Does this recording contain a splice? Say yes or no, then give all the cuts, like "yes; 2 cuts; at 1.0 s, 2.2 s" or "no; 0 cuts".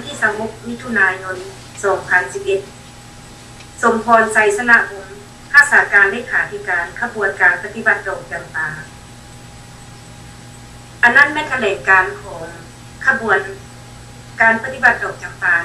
no; 0 cuts